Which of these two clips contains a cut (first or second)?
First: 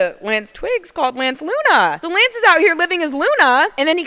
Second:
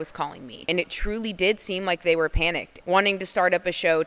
second